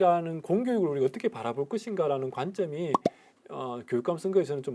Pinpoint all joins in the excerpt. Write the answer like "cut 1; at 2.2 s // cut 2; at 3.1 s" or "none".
none